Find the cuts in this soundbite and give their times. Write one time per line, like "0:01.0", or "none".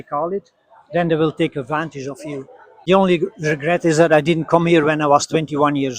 0:02.8